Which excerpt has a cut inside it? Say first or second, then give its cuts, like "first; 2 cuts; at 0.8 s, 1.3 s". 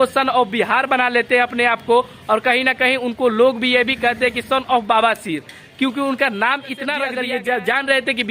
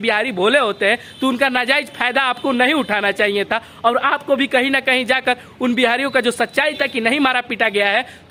first; 1 cut; at 7.1 s